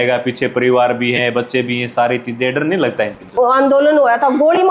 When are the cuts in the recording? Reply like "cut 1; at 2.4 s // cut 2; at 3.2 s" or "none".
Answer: cut 1; at 3.3 s